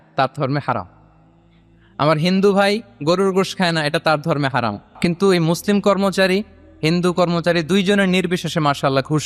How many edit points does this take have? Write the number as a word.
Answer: one